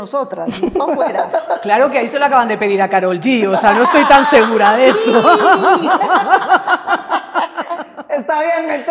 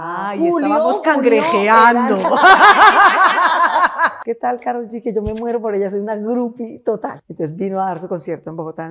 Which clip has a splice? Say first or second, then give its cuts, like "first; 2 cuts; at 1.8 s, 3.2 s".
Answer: second; 2 cuts; at 4.2 s, 7.2 s